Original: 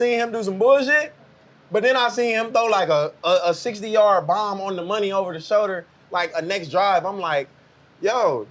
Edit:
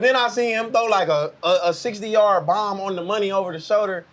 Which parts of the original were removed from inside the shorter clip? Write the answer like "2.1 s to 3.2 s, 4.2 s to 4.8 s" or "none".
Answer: none